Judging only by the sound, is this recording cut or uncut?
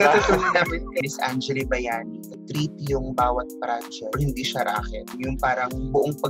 cut